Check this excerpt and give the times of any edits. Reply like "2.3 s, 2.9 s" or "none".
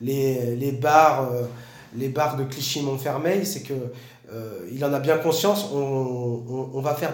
none